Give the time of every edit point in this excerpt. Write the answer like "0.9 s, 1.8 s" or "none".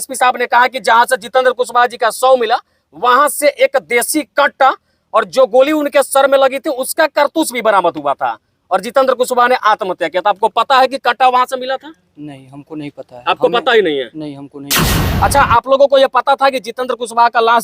15.0 s